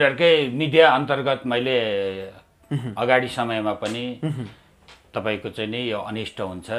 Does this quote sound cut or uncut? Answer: uncut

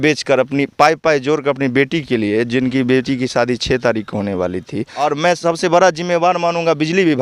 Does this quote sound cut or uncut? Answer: cut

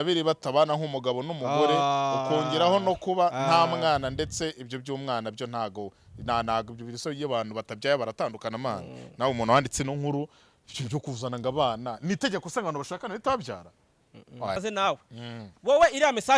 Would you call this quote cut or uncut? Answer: cut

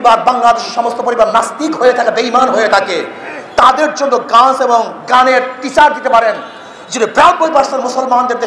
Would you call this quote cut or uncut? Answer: uncut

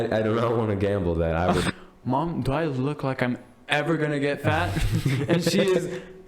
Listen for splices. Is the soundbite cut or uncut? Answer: cut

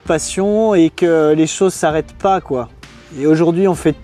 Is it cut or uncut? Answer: uncut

